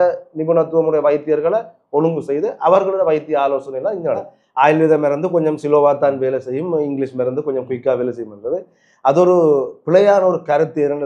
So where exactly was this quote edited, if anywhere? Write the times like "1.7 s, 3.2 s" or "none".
4.3 s